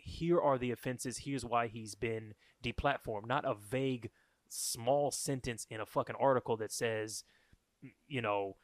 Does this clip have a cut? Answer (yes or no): no